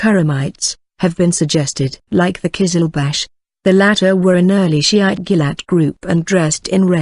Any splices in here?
yes; 1 cut; at 5.6 s

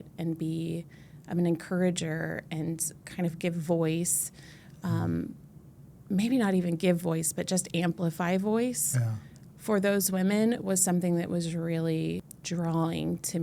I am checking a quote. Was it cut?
yes; 1 cut; at 12.3 s

